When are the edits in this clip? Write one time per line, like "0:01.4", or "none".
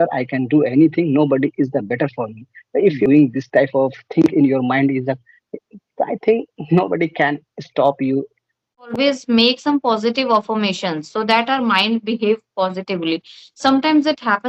0:03.0
0:08.9